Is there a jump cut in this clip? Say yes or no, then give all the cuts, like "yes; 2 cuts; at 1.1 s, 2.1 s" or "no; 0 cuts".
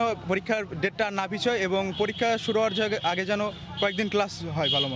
no; 0 cuts